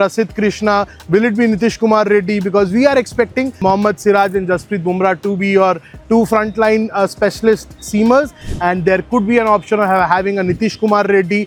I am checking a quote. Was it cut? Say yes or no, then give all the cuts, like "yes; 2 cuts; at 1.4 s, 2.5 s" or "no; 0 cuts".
no; 0 cuts